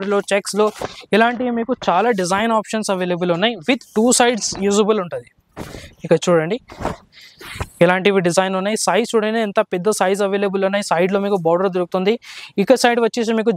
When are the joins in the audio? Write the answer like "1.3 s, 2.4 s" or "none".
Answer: none